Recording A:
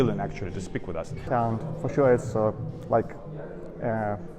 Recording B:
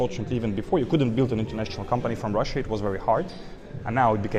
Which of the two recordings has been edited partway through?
A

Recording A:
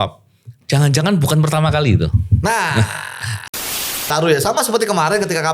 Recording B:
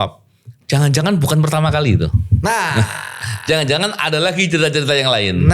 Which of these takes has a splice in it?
A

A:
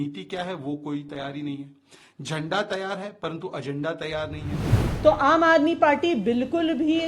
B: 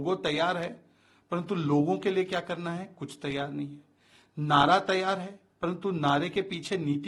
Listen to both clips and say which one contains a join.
A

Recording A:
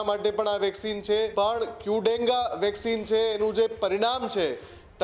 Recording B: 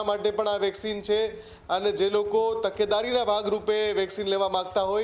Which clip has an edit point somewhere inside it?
A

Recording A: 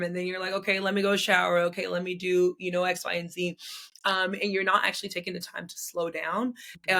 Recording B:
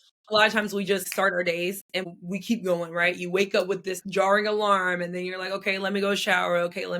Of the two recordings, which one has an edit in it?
B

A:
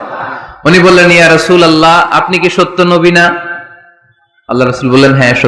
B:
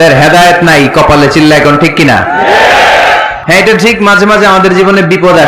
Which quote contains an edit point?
B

